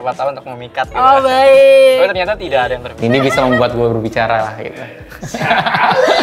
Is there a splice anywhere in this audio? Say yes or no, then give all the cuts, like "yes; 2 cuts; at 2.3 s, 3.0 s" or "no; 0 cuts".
yes; 1 cut; at 2.9 s